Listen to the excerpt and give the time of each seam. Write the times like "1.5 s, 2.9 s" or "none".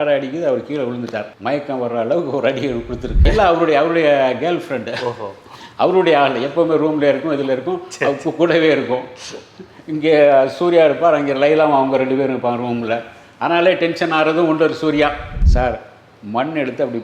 3.1 s, 15.3 s